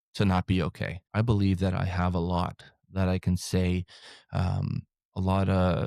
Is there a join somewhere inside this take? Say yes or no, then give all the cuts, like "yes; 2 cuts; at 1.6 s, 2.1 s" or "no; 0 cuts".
yes; 1 cut; at 1.0 s